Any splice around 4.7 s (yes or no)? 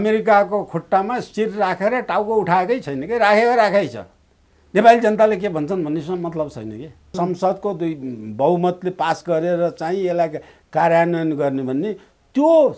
no